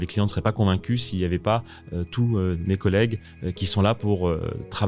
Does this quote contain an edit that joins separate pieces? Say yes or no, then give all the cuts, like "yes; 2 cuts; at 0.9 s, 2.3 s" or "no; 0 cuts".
no; 0 cuts